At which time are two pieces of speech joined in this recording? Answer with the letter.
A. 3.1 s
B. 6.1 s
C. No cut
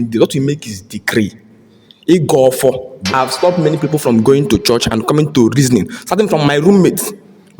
A